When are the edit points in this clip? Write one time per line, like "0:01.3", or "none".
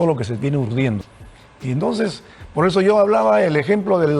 0:01.0